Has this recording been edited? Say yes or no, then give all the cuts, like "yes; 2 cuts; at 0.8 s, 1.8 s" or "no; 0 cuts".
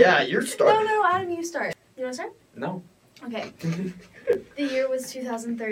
yes; 1 cut; at 1.7 s